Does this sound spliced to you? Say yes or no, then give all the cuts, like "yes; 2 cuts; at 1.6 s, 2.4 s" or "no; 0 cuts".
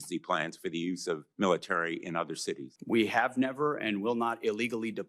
yes; 2 cuts; at 1.3 s, 2.7 s